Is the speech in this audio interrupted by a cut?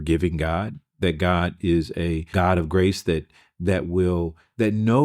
yes; 1 cut; at 2.3 s

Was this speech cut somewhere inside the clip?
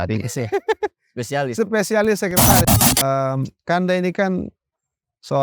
yes; 1 cut; at 2.7 s

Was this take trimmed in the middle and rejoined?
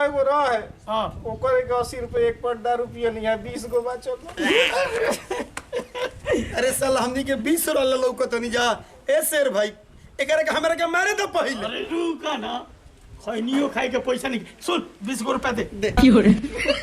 yes; 1 cut; at 15.9 s

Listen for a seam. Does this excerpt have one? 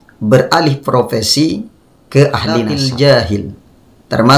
yes; 1 cut; at 2.7 s

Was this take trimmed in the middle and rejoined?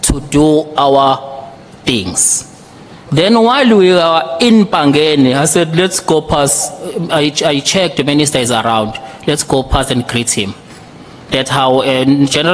no; 0 cuts

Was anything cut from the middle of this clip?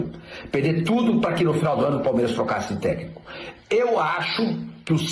no; 0 cuts

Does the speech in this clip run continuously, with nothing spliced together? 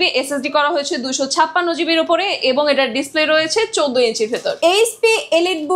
no; 1 cut; at 4.6 s

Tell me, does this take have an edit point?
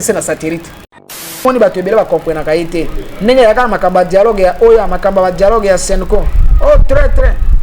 yes; 1 cut; at 1.4 s

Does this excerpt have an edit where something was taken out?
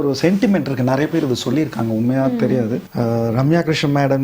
yes; 1 cut; at 2.9 s

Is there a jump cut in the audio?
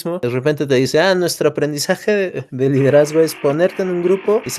no; 0 cuts

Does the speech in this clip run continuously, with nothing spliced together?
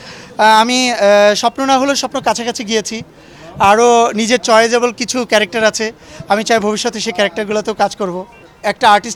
yes; 0 cuts

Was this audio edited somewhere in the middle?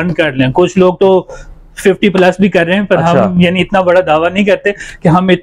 no; 0 cuts

